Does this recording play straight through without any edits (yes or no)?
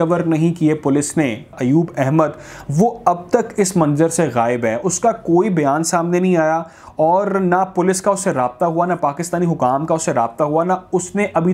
no